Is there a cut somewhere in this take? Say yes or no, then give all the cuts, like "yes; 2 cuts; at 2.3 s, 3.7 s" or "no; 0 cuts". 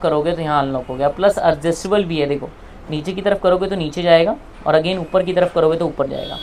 no; 0 cuts